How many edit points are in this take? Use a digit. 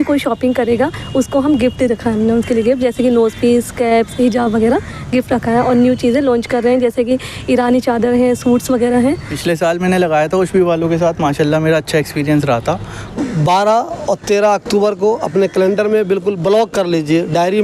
2